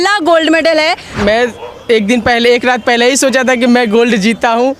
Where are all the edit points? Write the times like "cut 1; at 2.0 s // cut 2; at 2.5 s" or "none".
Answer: cut 1; at 1.1 s